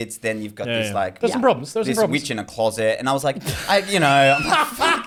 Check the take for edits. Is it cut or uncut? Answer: uncut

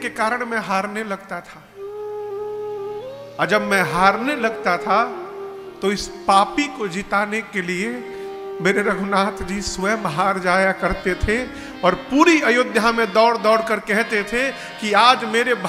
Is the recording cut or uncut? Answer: uncut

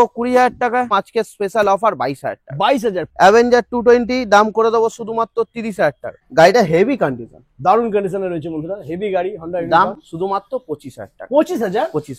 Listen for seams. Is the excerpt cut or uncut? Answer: cut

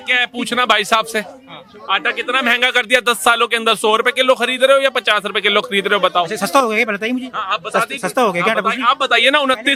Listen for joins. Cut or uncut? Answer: uncut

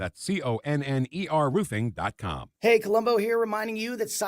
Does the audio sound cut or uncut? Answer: cut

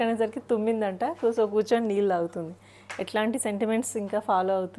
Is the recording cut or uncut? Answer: uncut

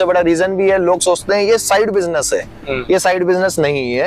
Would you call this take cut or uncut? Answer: uncut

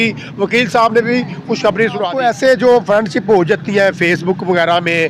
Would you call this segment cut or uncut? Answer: cut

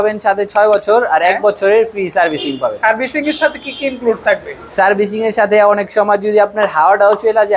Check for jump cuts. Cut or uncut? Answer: uncut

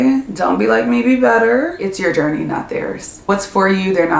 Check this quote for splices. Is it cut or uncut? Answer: cut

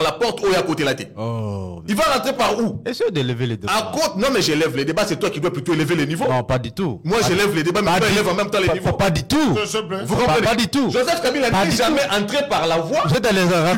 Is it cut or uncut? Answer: uncut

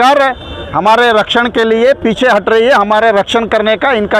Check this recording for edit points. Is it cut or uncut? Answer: uncut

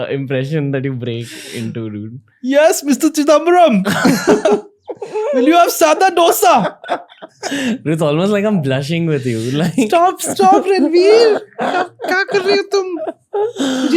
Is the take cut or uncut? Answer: uncut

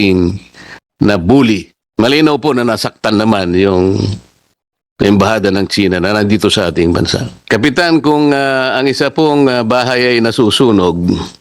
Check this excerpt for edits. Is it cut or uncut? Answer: cut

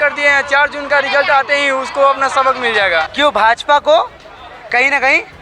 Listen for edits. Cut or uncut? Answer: cut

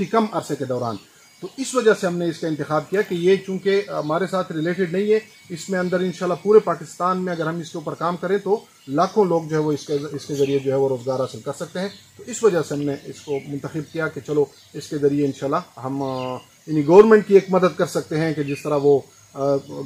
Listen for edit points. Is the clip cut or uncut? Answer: uncut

